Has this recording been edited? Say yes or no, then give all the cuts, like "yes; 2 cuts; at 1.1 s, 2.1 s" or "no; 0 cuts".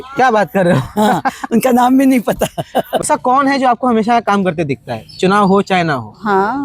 yes; 1 cut; at 3.0 s